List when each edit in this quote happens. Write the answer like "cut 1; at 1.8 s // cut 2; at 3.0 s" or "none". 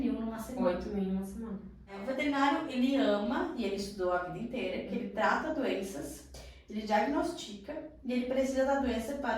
cut 1; at 2.0 s